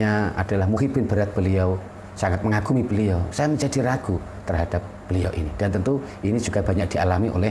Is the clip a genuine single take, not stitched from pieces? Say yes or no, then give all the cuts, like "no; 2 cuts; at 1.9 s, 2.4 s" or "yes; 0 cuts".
yes; 0 cuts